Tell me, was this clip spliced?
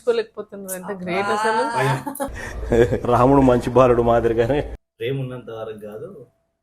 yes; 1 cut; at 4.9 s

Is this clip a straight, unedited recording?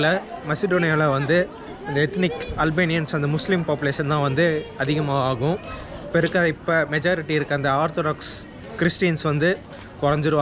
yes; 0 cuts

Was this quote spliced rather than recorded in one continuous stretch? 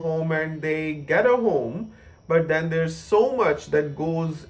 no; 0 cuts

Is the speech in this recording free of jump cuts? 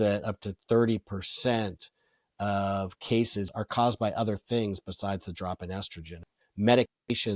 no; 2 cuts; at 3.4 s, 6.2 s

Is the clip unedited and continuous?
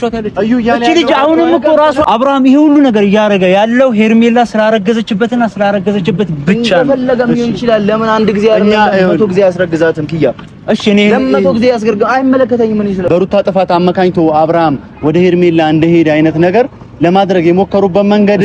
no; 2 cuts; at 2.0 s, 13.1 s

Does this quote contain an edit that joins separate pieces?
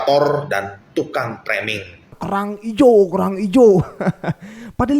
yes; 1 cut; at 2.1 s

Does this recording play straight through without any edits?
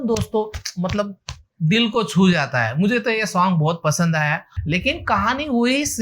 no; 1 cut; at 4.5 s

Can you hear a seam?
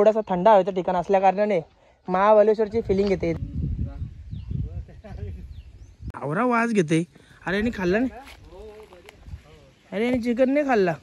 yes; 2 cuts; at 3.4 s, 6.1 s

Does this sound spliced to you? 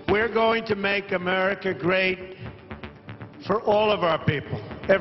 no; 0 cuts

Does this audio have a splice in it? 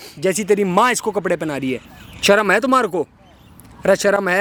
no; 0 cuts

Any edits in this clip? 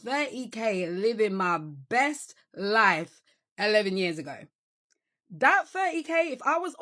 no; 0 cuts

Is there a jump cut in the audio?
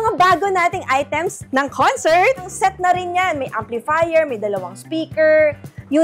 yes; 2 cuts; at 1.4 s, 2.5 s

